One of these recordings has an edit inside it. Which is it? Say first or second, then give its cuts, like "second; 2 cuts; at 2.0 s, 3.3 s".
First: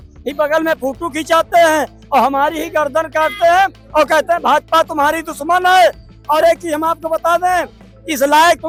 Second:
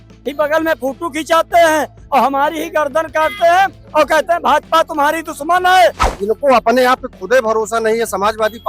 second; 1 cut; at 6.1 s